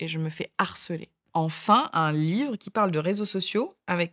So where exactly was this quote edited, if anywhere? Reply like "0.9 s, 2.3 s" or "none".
1.2 s